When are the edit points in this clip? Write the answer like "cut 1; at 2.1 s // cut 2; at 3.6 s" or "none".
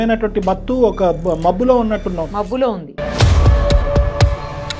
none